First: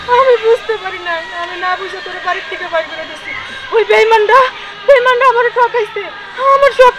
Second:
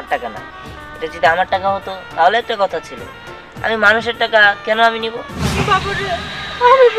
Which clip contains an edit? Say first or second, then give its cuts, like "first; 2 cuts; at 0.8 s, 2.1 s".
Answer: second; 1 cut; at 5.4 s